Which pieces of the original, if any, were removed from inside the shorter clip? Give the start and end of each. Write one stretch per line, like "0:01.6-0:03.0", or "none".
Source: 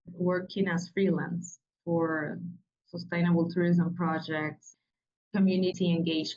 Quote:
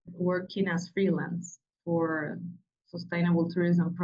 none